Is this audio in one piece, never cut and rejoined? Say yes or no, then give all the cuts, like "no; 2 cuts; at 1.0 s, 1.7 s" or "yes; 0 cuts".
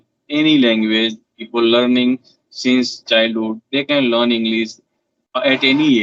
yes; 0 cuts